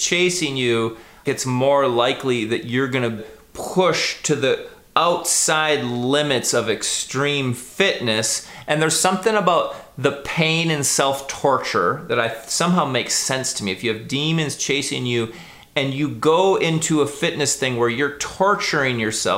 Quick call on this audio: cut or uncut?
cut